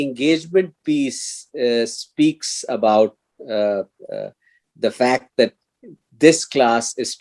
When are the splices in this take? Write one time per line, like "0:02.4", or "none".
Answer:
none